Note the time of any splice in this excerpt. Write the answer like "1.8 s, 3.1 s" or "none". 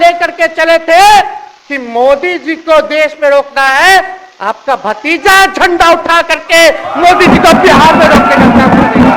none